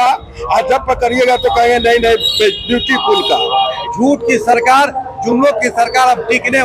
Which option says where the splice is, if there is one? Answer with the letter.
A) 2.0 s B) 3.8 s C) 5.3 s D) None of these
B